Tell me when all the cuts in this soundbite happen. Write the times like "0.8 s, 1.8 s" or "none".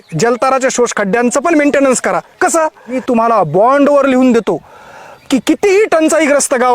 3.0 s

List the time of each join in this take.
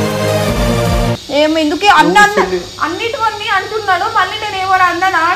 1.2 s

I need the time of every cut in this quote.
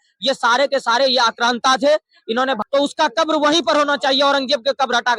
2.6 s

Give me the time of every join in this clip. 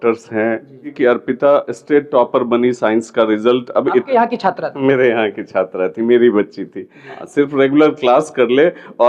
0.9 s, 7.2 s

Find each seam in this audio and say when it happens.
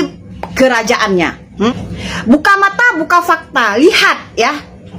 1.7 s

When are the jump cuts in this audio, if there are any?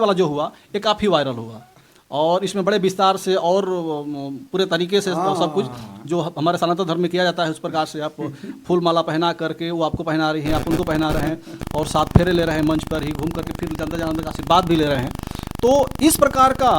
none

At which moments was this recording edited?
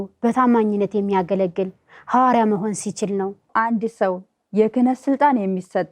3.5 s

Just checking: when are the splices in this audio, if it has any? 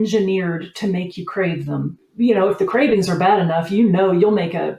2.0 s

